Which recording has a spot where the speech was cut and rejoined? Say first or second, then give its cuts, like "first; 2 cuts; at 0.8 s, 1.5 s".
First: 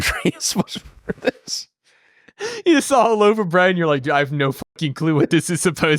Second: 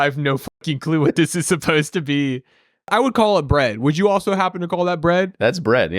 second; 1 cut; at 2.8 s